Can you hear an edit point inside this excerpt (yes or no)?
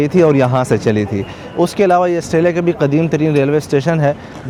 no